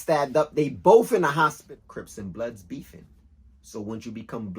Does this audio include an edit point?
yes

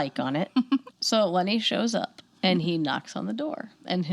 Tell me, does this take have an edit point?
yes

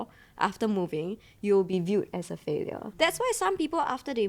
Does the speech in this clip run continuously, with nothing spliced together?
no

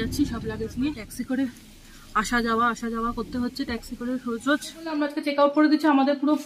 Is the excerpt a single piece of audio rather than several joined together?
no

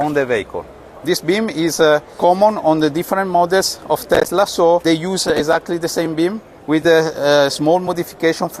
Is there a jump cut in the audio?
yes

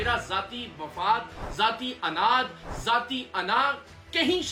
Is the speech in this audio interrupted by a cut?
no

